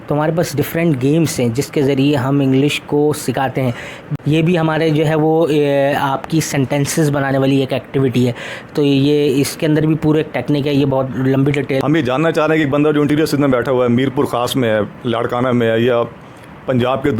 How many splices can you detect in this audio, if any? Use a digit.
2